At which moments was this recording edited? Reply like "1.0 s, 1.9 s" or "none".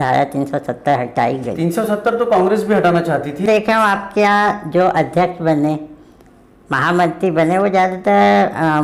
3.4 s